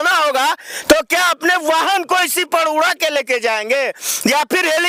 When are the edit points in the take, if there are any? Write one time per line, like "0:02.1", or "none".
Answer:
none